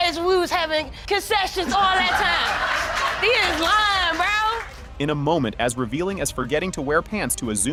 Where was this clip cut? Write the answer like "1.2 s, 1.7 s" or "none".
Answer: none